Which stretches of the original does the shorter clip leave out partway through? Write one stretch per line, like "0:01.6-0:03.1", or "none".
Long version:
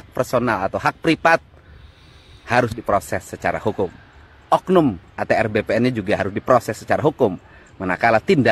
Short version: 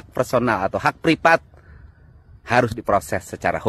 none